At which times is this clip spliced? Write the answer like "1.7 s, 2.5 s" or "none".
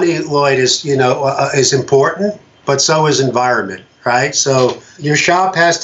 4.9 s